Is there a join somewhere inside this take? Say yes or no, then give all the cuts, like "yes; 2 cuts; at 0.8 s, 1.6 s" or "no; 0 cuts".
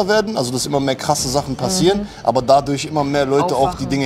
no; 0 cuts